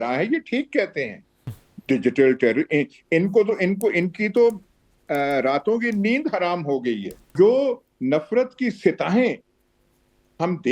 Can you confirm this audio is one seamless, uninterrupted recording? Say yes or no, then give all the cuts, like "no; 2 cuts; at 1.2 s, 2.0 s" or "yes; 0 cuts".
no; 1 cut; at 7.3 s